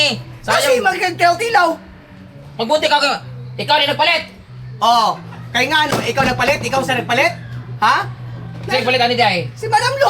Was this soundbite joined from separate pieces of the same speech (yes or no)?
no